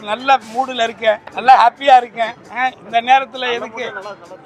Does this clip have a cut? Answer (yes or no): yes